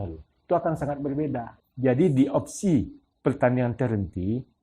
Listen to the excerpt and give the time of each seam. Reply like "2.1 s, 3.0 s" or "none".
1.6 s